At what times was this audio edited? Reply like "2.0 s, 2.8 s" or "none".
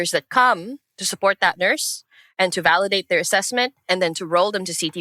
none